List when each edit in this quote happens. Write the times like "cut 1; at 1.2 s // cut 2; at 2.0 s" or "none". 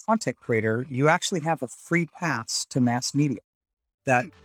none